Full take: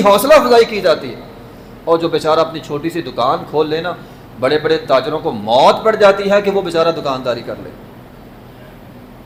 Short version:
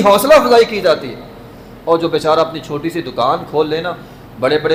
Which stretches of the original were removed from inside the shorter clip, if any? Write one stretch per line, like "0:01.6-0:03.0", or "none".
none

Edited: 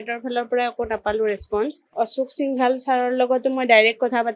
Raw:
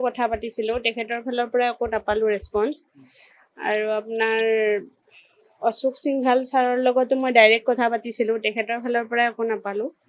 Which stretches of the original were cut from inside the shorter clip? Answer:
0:02.8-0:05.5

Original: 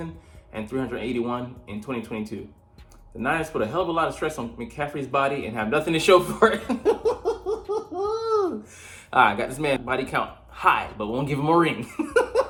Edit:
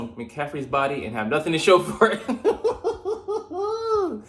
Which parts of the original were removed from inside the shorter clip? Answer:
none

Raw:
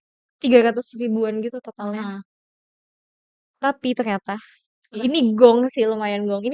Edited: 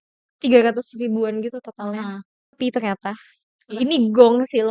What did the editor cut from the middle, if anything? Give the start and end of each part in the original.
0:02.5-0:03.8

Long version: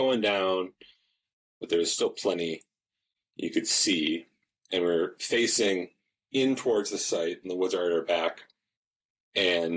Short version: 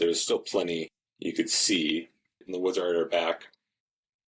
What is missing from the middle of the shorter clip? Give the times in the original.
0:02.7-0:03.2
0:04.6-0:07.4

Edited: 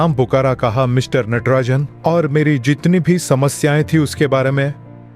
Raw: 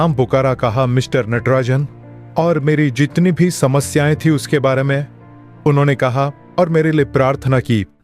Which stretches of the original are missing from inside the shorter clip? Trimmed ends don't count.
0:01.9-0:02.2

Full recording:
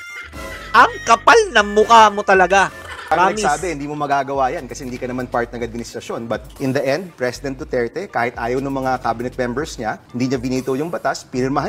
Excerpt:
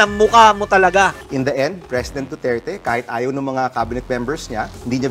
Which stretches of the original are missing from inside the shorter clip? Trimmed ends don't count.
0:02.8-0:06.5

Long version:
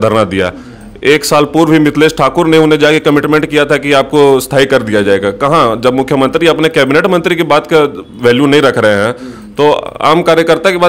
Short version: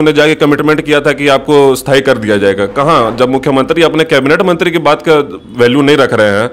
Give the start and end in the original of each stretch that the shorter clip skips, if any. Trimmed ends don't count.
none

